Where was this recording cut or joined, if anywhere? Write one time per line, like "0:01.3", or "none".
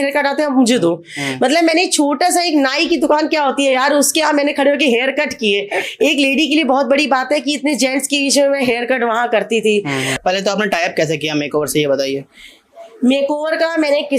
0:10.2